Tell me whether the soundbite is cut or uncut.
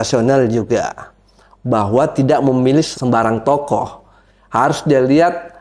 cut